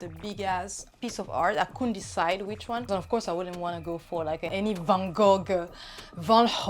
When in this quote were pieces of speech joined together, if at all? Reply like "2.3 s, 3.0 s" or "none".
0.9 s, 2.9 s, 4.5 s